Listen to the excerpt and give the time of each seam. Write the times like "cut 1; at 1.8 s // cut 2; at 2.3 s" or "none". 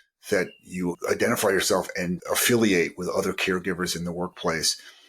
cut 1; at 1.0 s // cut 2; at 2.2 s